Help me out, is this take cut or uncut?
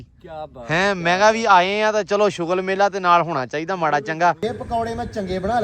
cut